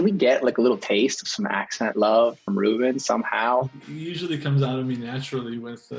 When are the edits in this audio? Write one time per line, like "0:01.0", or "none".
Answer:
0:03.7

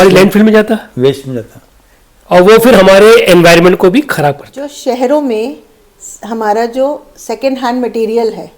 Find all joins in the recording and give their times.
0:04.4

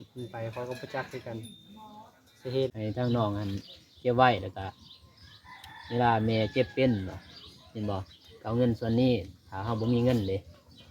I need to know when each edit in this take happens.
0:02.7

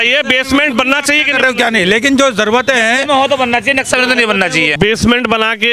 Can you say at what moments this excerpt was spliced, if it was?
0:04.8

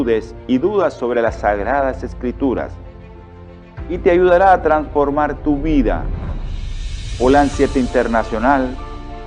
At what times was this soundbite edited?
none

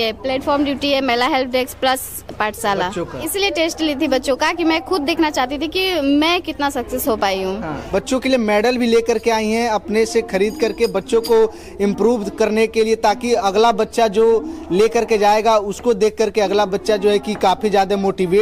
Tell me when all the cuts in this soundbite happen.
0:03.2
0:07.8

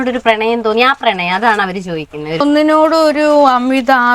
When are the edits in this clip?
0:02.4

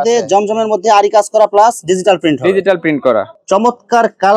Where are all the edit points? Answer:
0:03.3

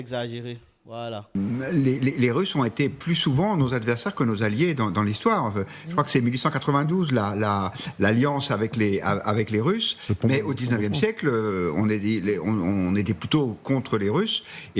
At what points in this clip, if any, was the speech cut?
0:01.3

